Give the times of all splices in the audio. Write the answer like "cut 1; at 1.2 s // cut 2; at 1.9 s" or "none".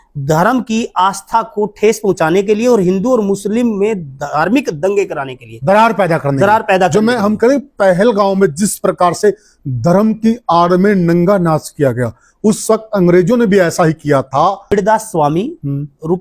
cut 1; at 14.7 s